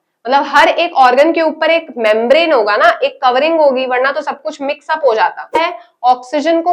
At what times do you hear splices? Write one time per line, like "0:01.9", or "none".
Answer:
0:05.6